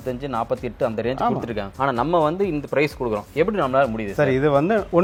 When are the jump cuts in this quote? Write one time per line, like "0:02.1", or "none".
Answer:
none